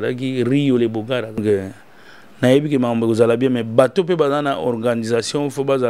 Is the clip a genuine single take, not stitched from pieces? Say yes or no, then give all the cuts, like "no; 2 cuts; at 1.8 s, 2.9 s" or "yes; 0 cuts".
no; 1 cut; at 1.4 s